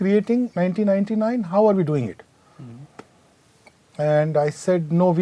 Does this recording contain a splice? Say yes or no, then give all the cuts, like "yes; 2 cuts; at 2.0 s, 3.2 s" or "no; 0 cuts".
no; 0 cuts